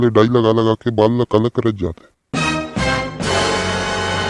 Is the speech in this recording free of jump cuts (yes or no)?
no